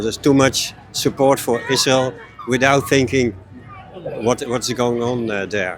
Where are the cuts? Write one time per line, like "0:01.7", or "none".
none

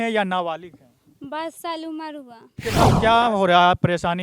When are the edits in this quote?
0:02.4

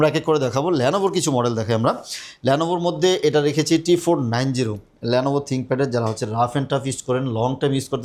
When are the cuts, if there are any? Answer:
none

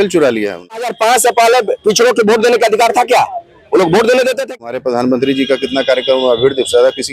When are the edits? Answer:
0:00.9
0:04.6

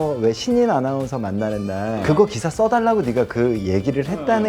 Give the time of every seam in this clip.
0:02.0

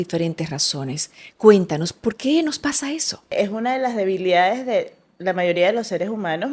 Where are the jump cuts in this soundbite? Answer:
0:03.3

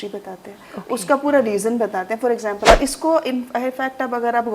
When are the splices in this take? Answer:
0:02.6

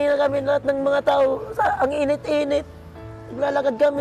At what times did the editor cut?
none

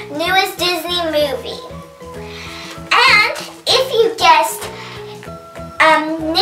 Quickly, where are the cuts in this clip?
0:02.5

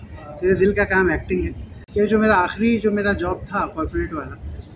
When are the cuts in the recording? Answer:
0:01.7

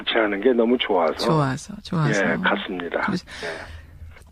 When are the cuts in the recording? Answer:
none

